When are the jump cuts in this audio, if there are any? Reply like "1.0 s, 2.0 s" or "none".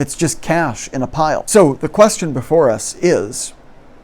1.4 s